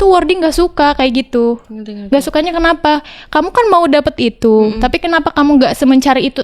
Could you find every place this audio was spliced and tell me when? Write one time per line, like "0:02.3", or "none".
none